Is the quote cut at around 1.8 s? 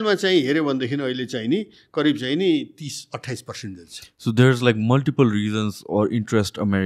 no; 0 cuts

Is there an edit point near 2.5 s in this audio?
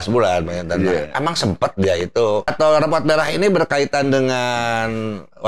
yes; 1 cut; at 2.5 s

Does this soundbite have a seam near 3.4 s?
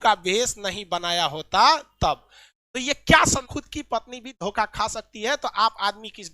yes; 1 cut; at 3.4 s

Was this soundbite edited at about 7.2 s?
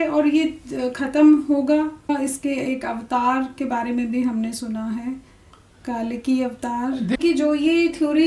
yes; 2 cuts; at 2.1 s, 7.2 s

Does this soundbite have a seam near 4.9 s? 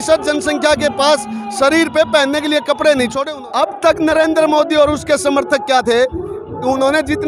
no; 1 cut; at 3.2 s

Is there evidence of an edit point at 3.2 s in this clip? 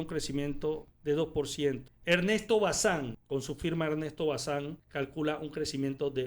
yes; 4 cuts; at 0.9 s, 1.9 s, 3.2 s, 4.8 s

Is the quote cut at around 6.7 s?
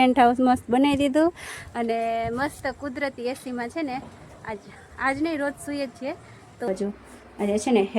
yes; 1 cut; at 6.7 s

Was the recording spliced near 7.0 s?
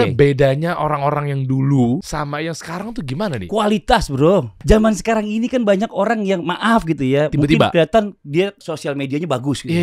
no; 3 cuts; at 2.0 s, 4.6 s, 8.6 s

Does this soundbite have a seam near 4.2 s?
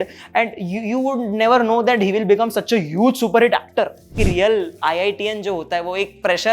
yes; 1 cut; at 4.2 s

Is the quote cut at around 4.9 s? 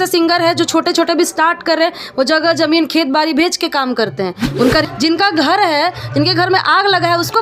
yes; 1 cut; at 4.9 s

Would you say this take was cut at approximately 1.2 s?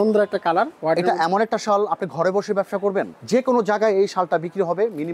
no; 1 cut; at 3.2 s

